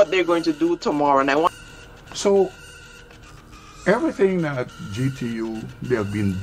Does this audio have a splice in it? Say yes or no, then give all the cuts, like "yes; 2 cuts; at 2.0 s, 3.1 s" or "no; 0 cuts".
yes; 1 cut; at 1.5 s